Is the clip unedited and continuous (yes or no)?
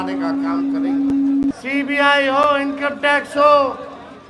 no